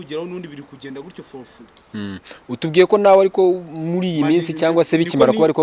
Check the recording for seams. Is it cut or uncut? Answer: uncut